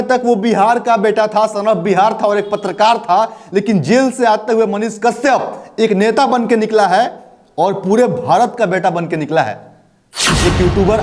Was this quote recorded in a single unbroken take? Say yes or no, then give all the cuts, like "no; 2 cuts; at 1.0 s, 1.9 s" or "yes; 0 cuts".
no; 1 cut; at 10.1 s